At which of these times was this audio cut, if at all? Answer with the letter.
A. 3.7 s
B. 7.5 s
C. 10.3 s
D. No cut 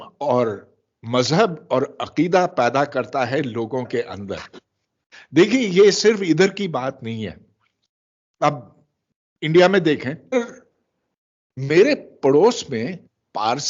C